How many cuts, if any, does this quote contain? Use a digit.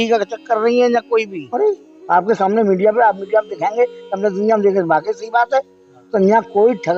1